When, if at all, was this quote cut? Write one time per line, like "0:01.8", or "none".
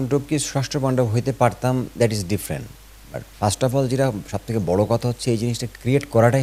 none